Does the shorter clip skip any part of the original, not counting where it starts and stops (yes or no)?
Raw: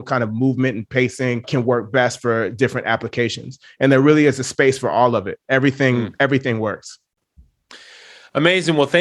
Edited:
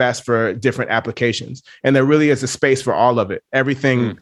no